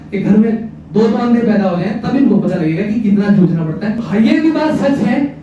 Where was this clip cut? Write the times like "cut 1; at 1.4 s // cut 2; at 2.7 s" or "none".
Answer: cut 1; at 4.0 s